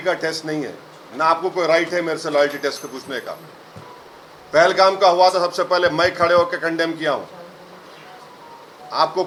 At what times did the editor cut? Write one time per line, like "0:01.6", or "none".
none